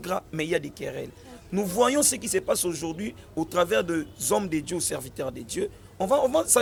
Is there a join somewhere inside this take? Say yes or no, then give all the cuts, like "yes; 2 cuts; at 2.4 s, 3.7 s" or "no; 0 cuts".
no; 0 cuts